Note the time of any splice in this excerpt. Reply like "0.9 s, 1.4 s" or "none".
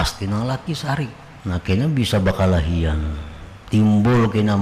1.3 s